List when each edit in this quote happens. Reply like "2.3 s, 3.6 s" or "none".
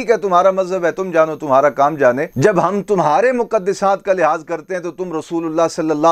none

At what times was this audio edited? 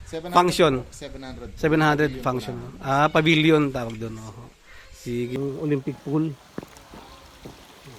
5.3 s

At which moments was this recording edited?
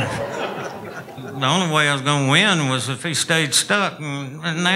1.2 s

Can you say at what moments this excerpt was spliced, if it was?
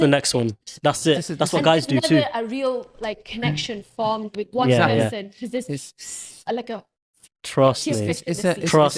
none

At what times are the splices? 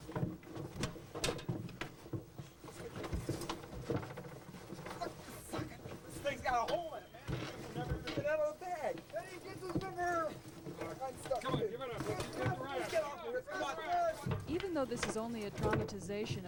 none

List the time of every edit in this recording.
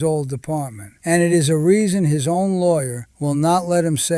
none

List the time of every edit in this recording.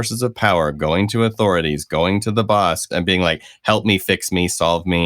2.9 s

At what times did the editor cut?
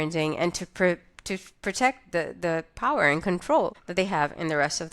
3.8 s

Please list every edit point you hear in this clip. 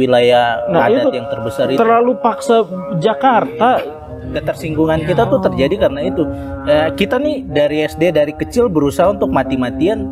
4.3 s

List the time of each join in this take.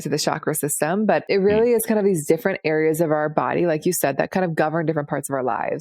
1.2 s

